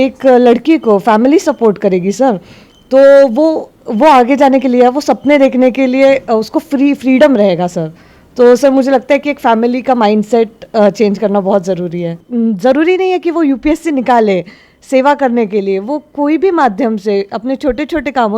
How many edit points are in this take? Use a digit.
1